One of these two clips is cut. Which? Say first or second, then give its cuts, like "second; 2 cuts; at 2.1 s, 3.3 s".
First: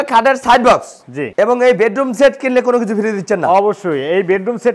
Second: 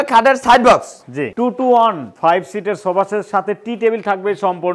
second; 1 cut; at 1.3 s